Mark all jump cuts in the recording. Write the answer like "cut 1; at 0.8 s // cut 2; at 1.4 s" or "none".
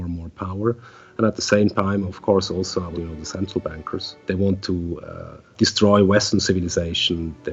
cut 1; at 2.9 s // cut 2; at 4.1 s // cut 3; at 5.5 s